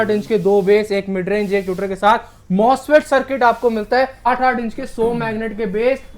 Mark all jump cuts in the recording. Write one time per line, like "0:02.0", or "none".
0:04.3